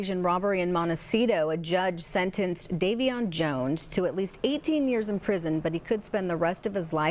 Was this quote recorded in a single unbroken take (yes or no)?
yes